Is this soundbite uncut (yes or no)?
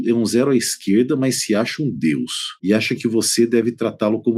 yes